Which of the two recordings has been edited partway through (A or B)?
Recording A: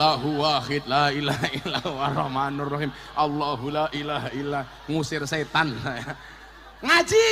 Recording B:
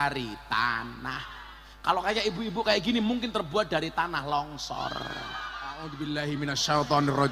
B